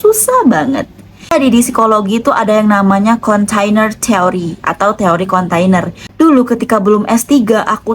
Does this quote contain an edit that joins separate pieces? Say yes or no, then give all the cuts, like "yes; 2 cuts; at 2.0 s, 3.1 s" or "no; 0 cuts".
yes; 2 cuts; at 1.3 s, 6.0 s